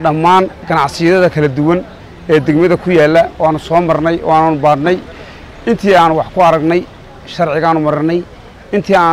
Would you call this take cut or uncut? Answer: uncut